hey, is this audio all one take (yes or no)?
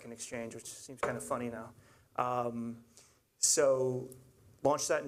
no